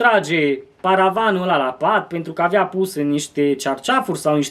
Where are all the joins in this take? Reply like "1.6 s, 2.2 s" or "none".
none